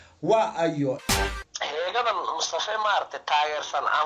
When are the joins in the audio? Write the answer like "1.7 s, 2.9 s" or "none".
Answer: 1.0 s